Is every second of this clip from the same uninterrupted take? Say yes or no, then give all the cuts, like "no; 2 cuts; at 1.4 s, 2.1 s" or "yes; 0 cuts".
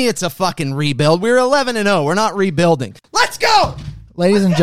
no; 1 cut; at 3.0 s